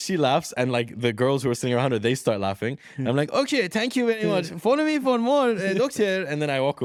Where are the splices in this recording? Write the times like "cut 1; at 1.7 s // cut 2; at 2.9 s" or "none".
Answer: none